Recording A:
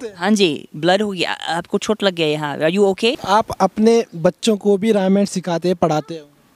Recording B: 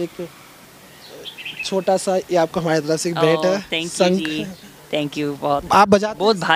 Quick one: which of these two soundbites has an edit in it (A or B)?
A